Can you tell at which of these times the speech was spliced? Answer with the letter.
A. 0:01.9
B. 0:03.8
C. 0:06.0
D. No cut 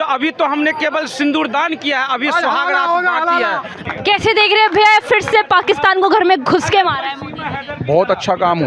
B